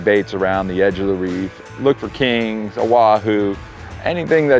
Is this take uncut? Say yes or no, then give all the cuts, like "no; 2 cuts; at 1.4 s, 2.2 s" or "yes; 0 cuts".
yes; 0 cuts